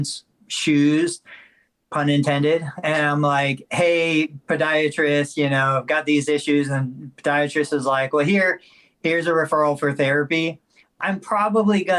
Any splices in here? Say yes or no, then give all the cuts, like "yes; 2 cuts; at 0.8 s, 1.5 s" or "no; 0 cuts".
no; 0 cuts